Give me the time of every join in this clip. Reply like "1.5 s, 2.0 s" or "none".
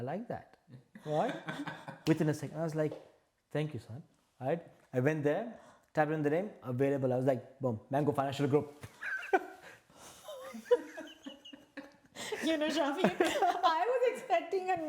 none